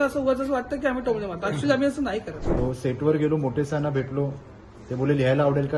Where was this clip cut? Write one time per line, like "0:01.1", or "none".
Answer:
0:02.4